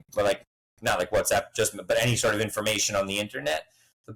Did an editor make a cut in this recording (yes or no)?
no